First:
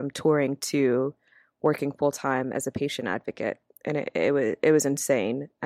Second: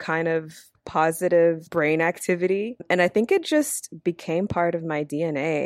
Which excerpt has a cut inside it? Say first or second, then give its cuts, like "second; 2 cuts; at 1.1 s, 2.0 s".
second; 3 cuts; at 0.8 s, 1.6 s, 2.8 s